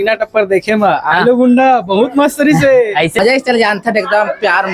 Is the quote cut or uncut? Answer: cut